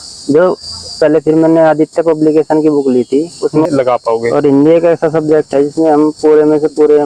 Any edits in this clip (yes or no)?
yes